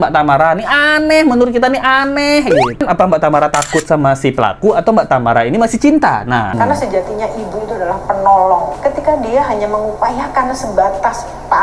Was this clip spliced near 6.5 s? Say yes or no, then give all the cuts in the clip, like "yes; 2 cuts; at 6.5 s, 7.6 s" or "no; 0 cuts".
yes; 3 cuts; at 2.8 s, 6.5 s, 8.7 s